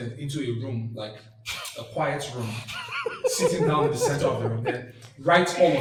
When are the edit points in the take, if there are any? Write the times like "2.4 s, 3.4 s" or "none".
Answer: none